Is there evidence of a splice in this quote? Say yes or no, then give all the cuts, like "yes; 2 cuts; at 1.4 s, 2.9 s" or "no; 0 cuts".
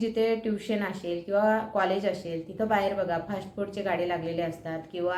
no; 0 cuts